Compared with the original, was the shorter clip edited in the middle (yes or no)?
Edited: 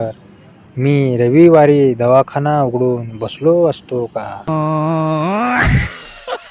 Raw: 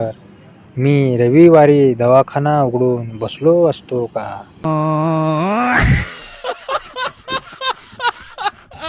yes